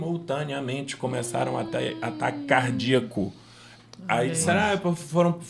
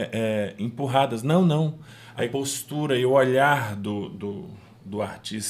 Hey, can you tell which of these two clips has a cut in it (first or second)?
second